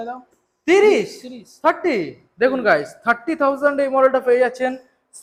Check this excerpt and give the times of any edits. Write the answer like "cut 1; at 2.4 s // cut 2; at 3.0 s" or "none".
none